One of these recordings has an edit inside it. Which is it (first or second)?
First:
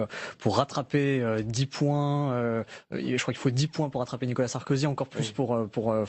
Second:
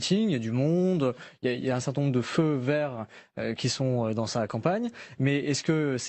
first